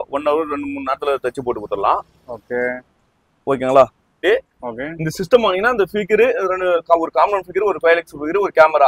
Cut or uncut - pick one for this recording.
cut